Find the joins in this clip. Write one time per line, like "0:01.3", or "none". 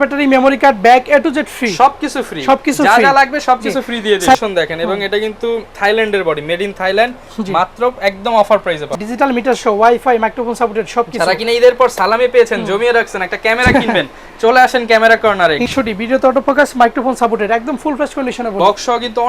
0:04.3
0:09.0
0:15.7
0:18.5